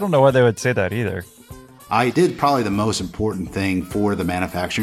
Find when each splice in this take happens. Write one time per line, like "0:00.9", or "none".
0:01.6